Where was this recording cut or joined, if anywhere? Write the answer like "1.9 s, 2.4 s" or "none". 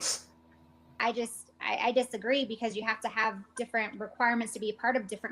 1.0 s